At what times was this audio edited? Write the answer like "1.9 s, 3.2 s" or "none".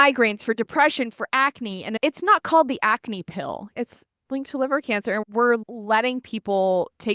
3.7 s, 5.2 s